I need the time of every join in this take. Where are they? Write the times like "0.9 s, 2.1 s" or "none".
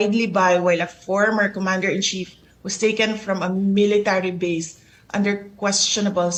none